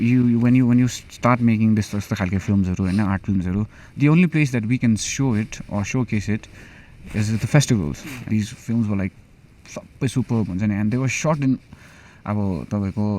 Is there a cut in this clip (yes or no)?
yes